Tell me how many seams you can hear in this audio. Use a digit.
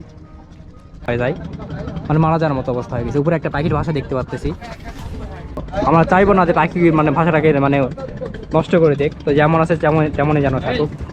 2